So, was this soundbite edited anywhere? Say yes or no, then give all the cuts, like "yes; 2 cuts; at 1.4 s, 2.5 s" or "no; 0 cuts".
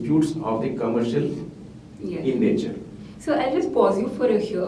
no; 0 cuts